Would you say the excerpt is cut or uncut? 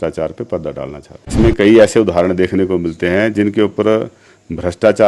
cut